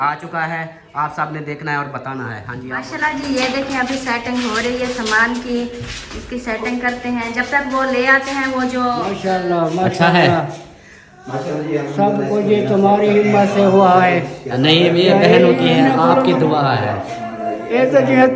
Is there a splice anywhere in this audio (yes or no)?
yes